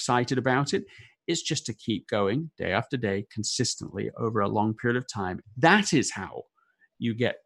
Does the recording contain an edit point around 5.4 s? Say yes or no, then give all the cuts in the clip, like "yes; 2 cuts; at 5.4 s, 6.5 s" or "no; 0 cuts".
yes; 1 cut; at 5.4 s